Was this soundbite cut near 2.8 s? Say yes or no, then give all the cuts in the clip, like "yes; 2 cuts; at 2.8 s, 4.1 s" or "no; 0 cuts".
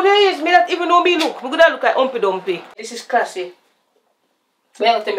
yes; 1 cut; at 2.8 s